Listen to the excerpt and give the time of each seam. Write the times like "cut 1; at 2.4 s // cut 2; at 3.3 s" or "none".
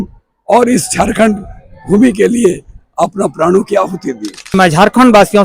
cut 1; at 4.5 s